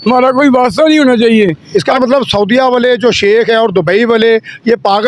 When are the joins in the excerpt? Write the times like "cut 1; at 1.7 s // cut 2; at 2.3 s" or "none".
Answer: cut 1; at 1.6 s